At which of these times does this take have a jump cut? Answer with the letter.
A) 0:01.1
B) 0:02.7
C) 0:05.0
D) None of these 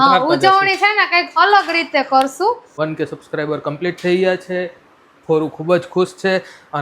B